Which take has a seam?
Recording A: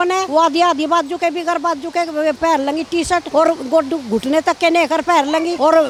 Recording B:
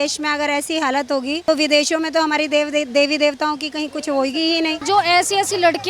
B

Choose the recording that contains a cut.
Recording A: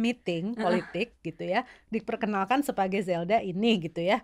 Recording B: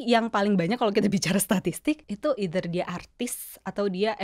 B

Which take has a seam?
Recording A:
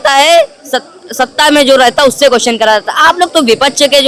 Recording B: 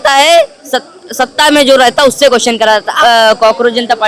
B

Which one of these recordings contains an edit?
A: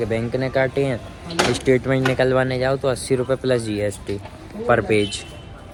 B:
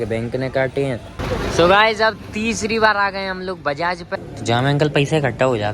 B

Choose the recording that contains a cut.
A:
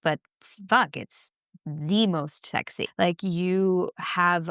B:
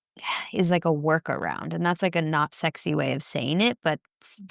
A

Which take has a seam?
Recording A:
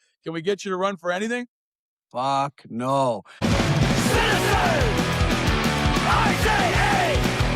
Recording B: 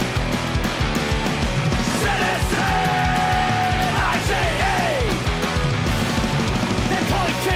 A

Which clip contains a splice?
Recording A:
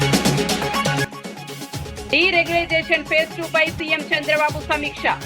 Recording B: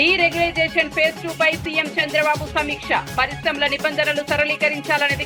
A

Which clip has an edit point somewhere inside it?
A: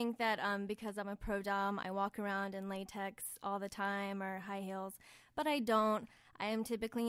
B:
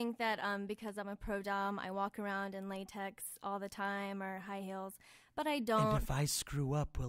B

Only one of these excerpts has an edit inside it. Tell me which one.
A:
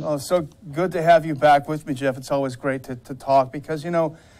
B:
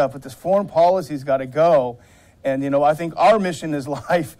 B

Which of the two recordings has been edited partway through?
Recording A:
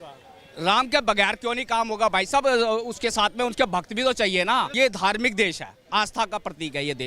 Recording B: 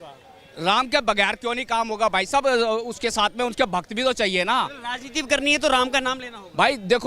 A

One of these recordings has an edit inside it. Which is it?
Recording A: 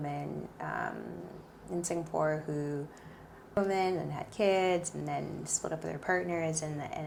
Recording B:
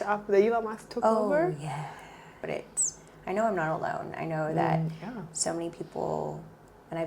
B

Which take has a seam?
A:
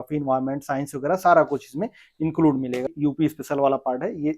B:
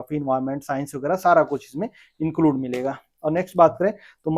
A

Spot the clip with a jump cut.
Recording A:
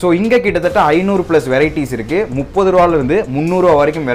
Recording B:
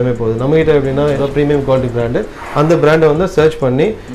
B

